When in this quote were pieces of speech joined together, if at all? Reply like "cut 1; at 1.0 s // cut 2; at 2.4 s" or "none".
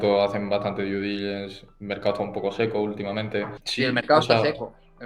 cut 1; at 3.6 s